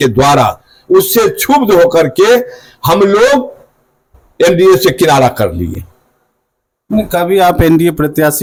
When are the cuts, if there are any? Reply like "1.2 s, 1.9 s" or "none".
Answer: none